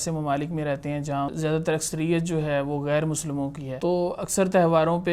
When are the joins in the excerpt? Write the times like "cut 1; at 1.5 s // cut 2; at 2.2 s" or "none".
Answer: cut 1; at 1.3 s // cut 2; at 3.7 s